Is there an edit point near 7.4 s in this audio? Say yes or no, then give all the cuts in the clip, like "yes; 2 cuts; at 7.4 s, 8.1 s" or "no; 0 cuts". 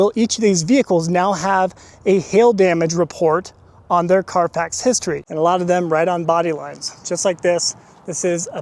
no; 1 cut; at 5.2 s